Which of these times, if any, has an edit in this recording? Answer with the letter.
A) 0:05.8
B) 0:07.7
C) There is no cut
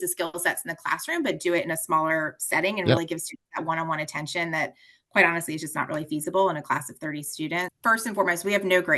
B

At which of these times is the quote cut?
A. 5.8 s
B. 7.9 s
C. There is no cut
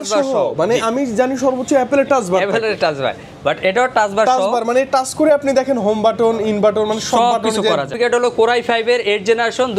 B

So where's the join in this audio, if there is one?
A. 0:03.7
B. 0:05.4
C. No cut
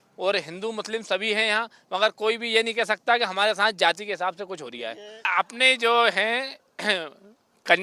B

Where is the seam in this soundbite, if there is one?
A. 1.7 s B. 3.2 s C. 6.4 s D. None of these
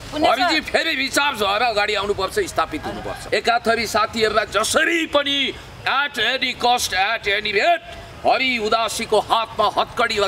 B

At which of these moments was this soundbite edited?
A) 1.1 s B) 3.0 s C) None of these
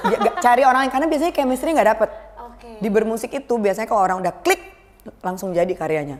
C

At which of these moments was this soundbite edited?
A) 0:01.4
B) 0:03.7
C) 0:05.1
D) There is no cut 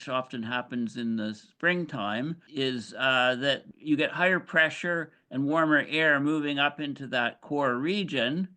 B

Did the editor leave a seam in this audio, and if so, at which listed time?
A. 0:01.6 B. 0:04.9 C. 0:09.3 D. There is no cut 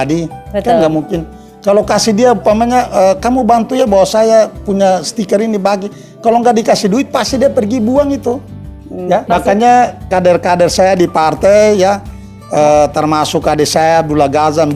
C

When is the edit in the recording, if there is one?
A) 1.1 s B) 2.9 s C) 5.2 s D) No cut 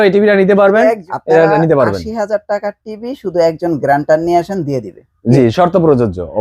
A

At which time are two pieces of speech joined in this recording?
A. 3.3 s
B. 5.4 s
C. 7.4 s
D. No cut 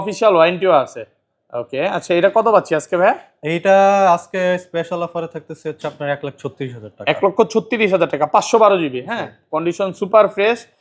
D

